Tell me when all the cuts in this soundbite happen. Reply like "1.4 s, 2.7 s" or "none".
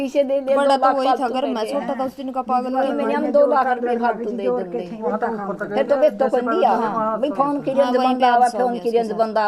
5.1 s